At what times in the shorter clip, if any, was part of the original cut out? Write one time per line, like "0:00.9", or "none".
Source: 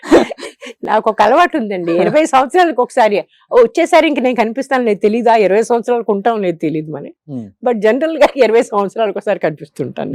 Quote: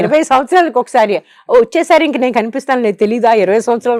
none